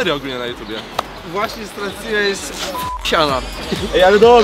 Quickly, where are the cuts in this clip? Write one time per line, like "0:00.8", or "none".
0:01.2